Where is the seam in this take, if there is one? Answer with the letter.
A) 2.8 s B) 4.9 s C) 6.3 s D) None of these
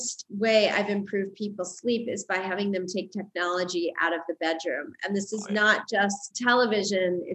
C